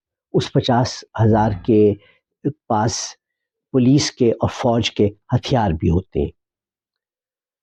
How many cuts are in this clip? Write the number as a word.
zero